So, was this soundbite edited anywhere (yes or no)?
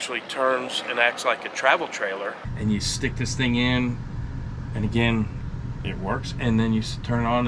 yes